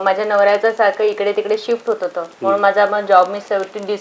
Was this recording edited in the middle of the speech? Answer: no; 0 cuts

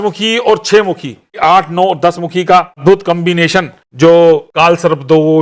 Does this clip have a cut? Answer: yes; 4 cuts; at 1.4 s, 2.8 s, 3.8 s, 4.5 s

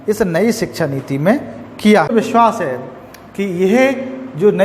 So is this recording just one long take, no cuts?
no; 1 cut; at 2.1 s

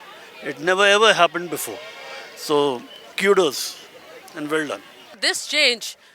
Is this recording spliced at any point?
yes; 1 cut; at 5.2 s

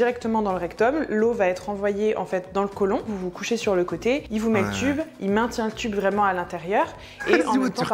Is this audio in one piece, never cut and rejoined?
no; 1 cut; at 3.1 s

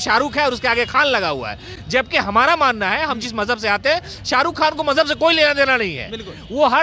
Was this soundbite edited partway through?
no; 0 cuts

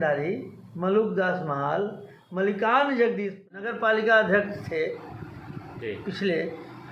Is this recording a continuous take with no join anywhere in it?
no; 1 cut; at 3.5 s

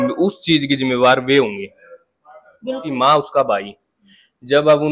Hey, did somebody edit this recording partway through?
yes; 1 cut; at 2.8 s

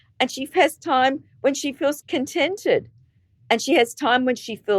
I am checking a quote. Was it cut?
yes; 1 cut; at 2.0 s

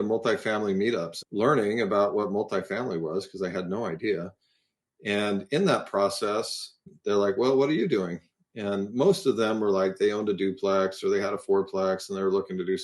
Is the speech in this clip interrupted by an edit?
yes; 2 cuts; at 1.1 s, 6.9 s

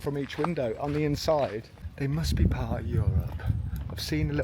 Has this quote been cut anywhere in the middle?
yes; 1 cut; at 1.8 s

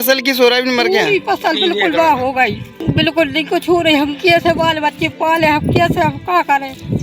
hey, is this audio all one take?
no; 1 cut; at 2.8 s

